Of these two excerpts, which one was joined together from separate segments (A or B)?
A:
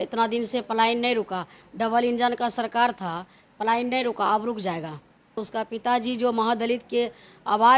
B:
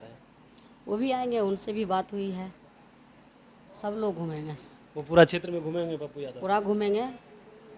A